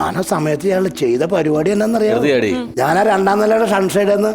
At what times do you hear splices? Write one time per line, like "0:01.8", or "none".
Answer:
0:02.6